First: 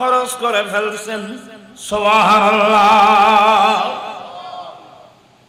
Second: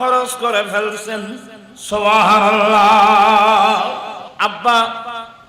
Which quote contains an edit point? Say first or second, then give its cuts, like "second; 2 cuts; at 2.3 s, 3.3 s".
second; 1 cut; at 4.2 s